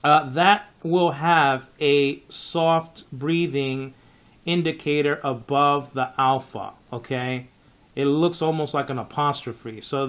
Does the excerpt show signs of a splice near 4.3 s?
yes; 1 cut; at 4.3 s

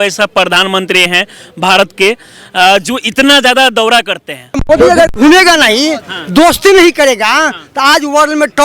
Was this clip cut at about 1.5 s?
no; 1 cut; at 4.6 s

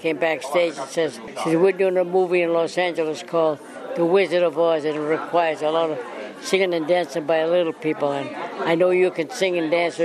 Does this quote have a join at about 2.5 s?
no; 1 cut; at 1.3 s

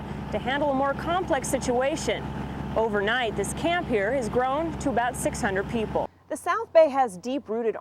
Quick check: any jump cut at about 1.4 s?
no; 1 cut; at 6.2 s

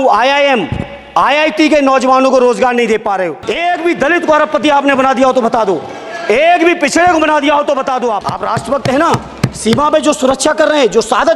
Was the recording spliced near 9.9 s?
no; 2 cuts; at 3.4 s, 8.3 s

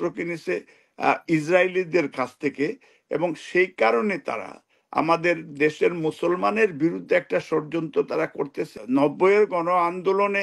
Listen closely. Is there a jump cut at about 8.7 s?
yes; 1 cut; at 8.7 s

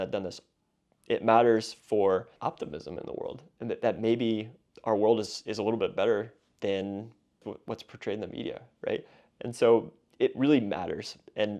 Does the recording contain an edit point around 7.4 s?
yes; 2 cuts; at 2.3 s, 7.4 s

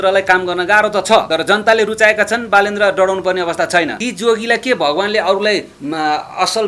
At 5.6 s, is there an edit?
no; 2 cuts; at 1.3 s, 4.0 s

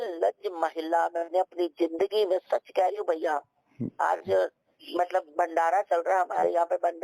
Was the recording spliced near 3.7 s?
no; 0 cuts

